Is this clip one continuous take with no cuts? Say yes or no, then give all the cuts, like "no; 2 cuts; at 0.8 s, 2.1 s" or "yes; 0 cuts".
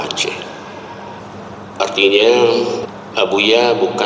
no; 2 cuts; at 1.2 s, 2.8 s